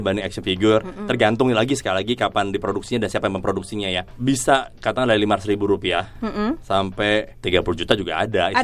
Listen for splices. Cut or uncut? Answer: cut